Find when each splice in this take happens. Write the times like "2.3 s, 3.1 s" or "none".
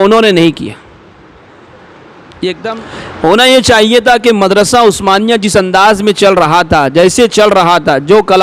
2.8 s